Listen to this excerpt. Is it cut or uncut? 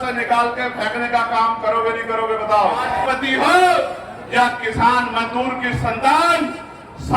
cut